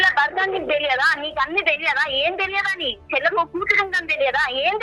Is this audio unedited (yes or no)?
yes